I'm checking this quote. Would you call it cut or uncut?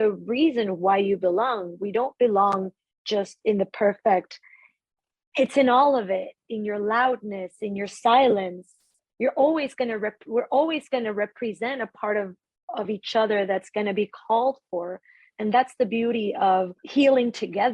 cut